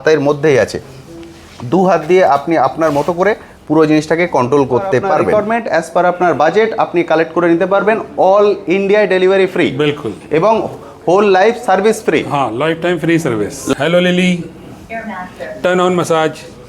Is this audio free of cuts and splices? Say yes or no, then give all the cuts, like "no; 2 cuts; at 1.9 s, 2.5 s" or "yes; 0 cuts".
no; 2 cuts; at 5.3 s, 13.7 s